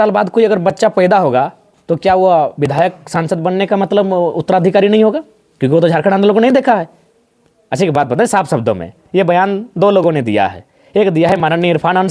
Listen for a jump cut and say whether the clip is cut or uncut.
uncut